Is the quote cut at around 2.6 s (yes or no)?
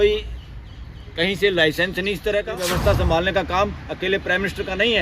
yes